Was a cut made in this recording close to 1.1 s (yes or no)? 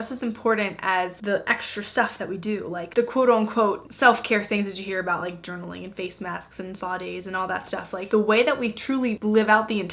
no